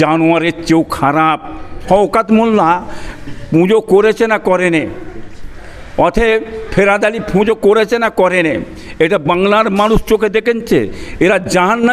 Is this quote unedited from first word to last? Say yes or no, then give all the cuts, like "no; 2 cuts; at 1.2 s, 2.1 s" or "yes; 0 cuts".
no; 1 cut; at 1.8 s